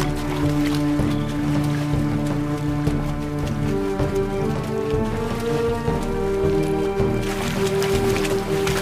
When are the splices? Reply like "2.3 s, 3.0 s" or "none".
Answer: none